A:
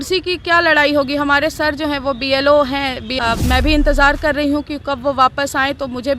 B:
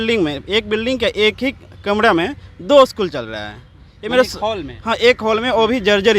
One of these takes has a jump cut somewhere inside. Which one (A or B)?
A